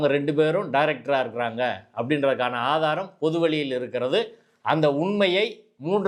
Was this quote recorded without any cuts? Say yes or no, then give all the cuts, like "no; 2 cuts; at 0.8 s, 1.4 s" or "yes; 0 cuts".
yes; 0 cuts